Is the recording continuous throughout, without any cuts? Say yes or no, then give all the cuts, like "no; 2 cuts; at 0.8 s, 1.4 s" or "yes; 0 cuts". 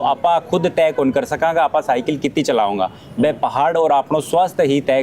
yes; 0 cuts